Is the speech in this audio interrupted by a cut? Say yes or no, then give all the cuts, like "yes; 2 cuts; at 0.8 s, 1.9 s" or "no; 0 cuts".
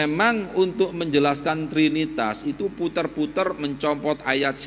no; 0 cuts